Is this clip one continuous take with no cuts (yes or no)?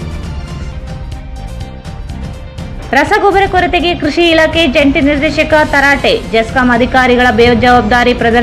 no